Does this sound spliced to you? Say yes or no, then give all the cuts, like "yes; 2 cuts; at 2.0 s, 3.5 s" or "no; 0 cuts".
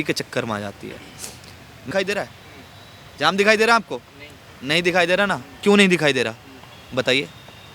yes; 1 cut; at 1.9 s